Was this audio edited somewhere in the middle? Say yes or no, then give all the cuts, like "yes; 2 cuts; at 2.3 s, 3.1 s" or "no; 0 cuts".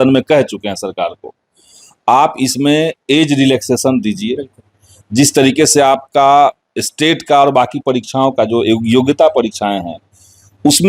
no; 0 cuts